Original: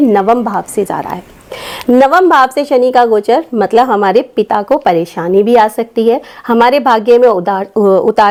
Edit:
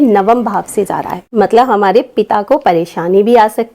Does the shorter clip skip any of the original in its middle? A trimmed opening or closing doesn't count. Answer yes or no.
yes